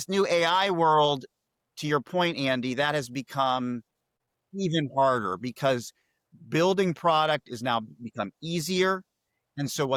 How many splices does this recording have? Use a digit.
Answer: 0